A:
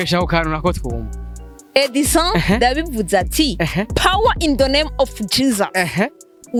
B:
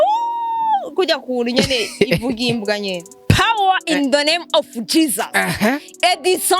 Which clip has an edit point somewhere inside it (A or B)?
B